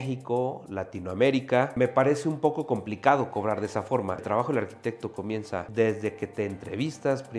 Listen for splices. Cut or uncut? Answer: cut